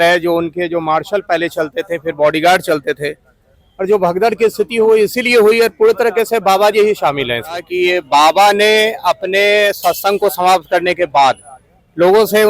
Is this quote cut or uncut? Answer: cut